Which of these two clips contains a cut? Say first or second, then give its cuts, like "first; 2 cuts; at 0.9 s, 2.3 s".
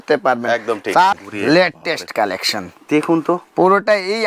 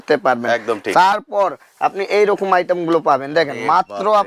first; 1 cut; at 1.2 s